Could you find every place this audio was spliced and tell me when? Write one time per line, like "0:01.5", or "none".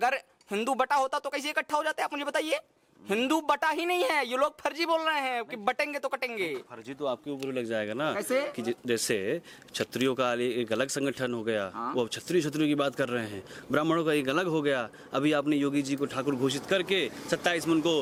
none

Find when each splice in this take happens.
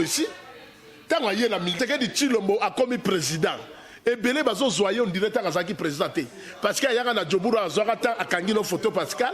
0:01.7

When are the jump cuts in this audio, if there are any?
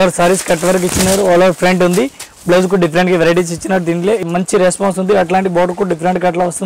0:04.2

